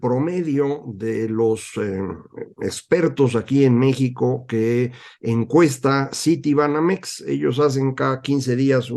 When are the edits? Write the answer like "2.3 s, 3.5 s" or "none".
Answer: none